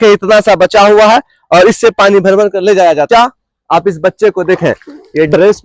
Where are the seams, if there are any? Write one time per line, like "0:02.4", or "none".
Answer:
0:03.1